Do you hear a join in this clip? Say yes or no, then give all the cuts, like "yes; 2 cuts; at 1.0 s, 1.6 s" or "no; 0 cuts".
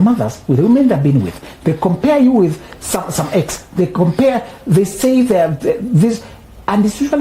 no; 0 cuts